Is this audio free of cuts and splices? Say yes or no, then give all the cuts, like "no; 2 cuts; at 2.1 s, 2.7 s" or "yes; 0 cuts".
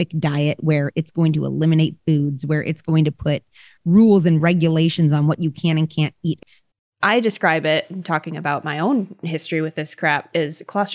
no; 1 cut; at 6.4 s